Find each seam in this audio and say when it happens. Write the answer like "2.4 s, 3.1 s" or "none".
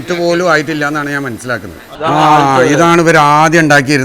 1.8 s

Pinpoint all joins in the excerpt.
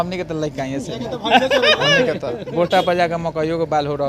none

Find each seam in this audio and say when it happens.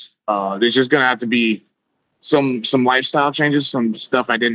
none

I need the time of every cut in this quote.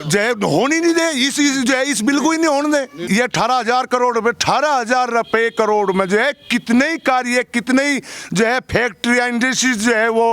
3.0 s

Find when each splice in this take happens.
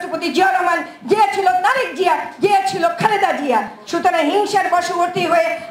none

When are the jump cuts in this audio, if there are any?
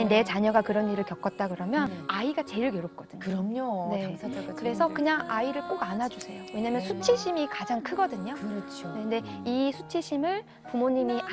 2.0 s

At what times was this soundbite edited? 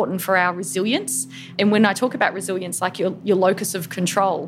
1.4 s

